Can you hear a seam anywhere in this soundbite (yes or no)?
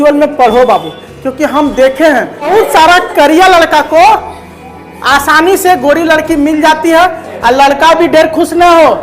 yes